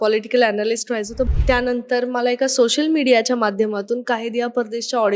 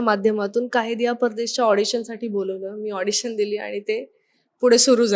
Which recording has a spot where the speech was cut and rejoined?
first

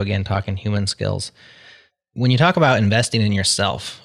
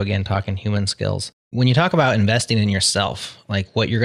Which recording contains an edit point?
second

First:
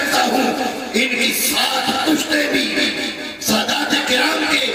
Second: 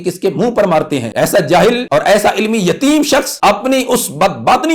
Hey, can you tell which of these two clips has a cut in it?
second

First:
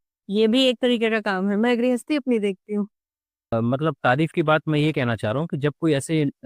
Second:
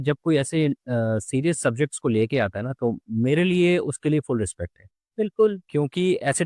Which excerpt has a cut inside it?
first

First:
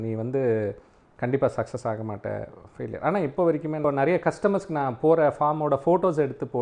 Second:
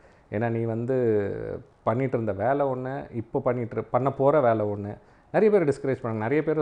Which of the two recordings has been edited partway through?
first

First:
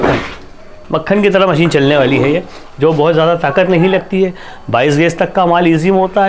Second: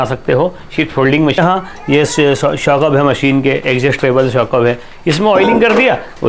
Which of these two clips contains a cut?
second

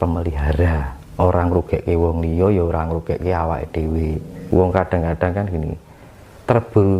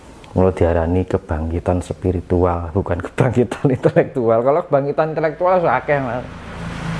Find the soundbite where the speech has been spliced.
first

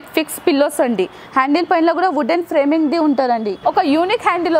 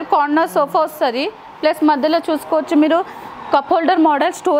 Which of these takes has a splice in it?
first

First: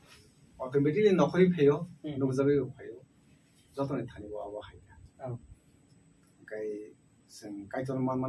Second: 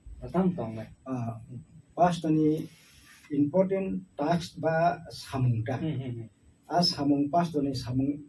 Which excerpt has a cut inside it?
first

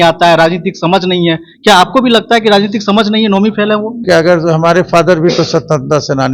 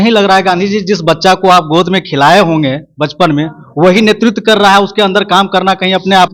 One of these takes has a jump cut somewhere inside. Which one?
first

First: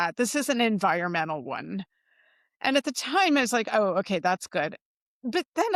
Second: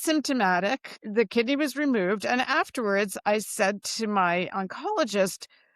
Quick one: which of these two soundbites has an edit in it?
second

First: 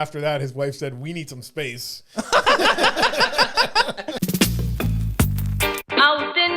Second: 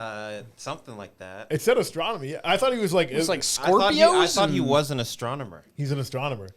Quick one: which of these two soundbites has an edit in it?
first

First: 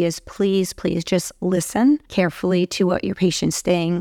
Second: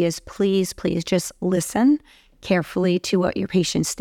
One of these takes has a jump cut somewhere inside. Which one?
first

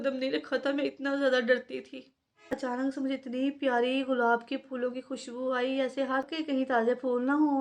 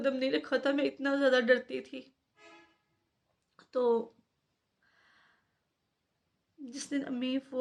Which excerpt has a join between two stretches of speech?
first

